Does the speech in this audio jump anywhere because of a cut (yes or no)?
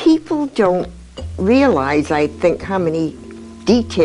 no